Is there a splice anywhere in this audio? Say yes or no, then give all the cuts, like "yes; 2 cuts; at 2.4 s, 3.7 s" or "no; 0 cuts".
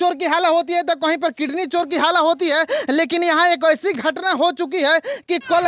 no; 0 cuts